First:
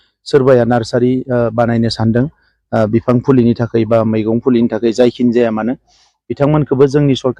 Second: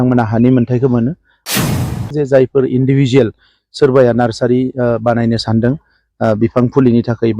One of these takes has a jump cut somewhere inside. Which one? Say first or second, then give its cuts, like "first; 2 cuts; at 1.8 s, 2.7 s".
second; 1 cut; at 1.7 s